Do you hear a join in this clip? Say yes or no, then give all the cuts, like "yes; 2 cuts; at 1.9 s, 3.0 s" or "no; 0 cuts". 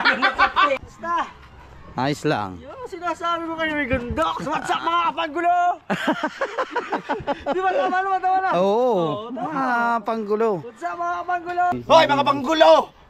yes; 2 cuts; at 0.8 s, 11.7 s